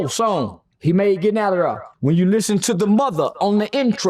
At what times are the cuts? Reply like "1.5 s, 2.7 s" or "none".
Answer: 1.9 s